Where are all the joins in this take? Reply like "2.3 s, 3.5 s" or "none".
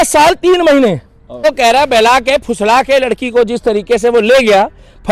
1.4 s